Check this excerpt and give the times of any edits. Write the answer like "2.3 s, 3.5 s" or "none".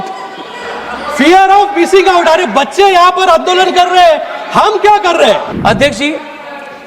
5.5 s